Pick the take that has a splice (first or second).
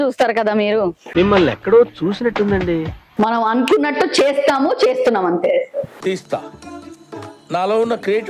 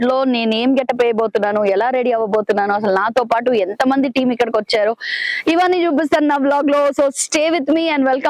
first